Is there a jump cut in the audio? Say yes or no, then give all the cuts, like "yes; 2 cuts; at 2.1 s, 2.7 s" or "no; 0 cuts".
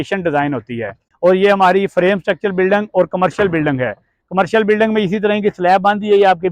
yes; 1 cut; at 1.0 s